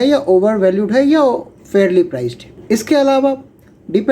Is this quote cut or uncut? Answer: cut